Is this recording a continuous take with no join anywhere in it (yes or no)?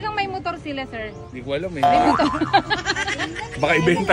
yes